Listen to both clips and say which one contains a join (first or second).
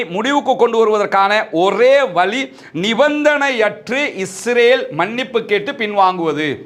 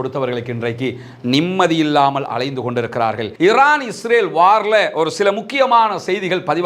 second